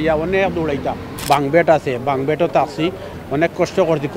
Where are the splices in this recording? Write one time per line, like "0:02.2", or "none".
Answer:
0:01.2
0:03.1